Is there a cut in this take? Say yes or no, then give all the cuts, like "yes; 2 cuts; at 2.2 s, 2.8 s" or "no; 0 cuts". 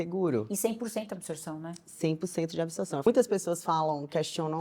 yes; 1 cut; at 3.0 s